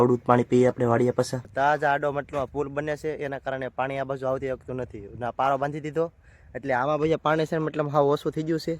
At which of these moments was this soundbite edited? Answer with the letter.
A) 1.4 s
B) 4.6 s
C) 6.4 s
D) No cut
A